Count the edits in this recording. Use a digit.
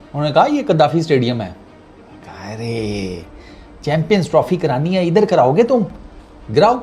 0